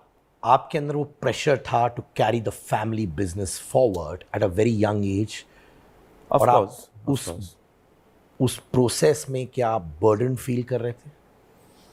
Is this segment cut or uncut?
uncut